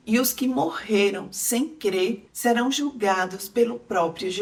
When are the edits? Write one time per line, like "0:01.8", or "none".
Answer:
none